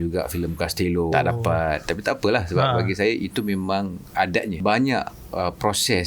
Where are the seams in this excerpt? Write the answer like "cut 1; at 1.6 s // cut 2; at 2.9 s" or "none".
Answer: cut 1; at 1.1 s // cut 2; at 4.6 s